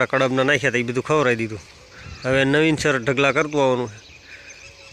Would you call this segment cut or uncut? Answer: uncut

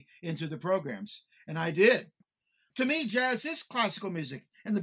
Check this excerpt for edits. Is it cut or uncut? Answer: cut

